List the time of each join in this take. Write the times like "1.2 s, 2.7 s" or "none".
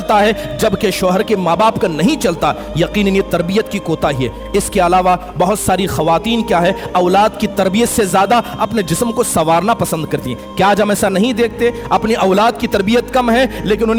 none